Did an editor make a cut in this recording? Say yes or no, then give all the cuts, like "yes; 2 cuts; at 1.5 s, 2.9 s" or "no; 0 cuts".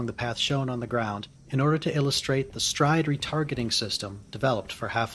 no; 0 cuts